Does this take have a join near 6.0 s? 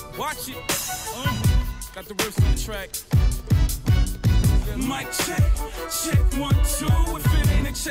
no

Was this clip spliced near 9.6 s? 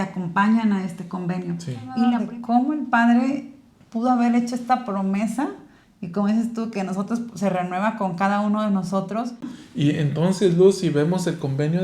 yes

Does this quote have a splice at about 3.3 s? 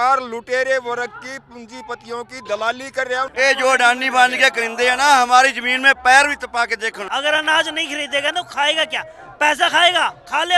yes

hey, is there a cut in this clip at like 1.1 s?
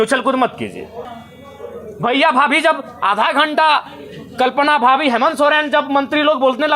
yes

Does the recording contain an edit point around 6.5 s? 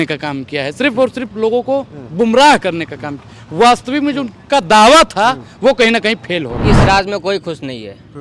yes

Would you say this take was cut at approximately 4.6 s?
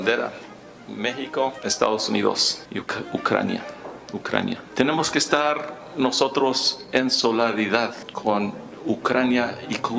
yes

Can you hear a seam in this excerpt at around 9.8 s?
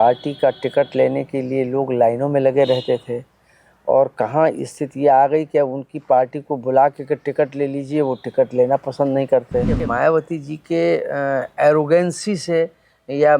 yes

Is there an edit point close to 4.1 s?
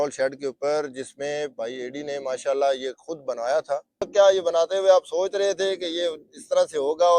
yes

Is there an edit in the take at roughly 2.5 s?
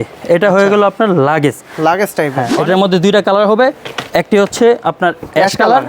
yes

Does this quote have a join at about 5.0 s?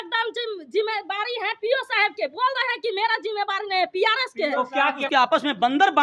yes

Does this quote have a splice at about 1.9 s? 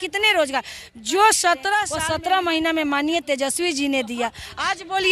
yes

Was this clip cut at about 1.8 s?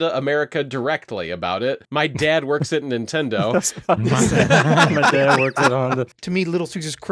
yes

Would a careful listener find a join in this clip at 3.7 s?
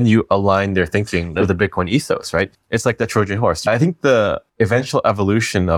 yes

